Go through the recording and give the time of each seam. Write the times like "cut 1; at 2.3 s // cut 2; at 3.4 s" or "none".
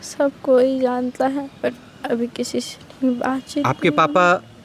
none